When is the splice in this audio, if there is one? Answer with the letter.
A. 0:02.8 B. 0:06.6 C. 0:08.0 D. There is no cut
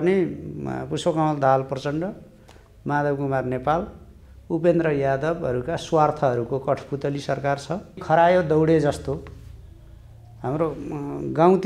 C